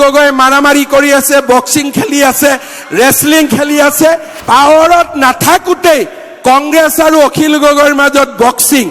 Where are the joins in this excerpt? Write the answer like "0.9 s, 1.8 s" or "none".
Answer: 4.3 s

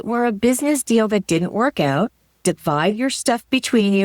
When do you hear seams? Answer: 2.3 s

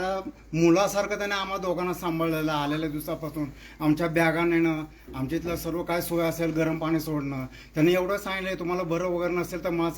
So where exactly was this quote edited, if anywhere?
none

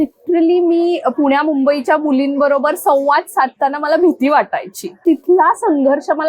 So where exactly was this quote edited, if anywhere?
4.9 s

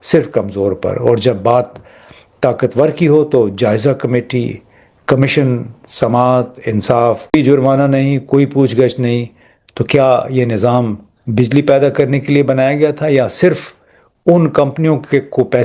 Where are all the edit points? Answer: 7.3 s

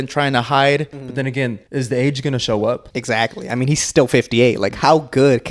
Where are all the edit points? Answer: 1.3 s, 2.9 s

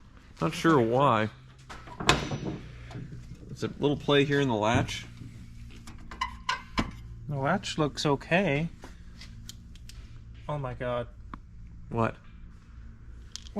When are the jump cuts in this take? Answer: 1.8 s

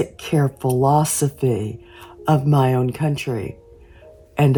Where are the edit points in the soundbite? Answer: none

